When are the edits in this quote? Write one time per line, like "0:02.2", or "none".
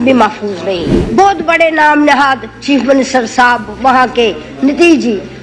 0:01.0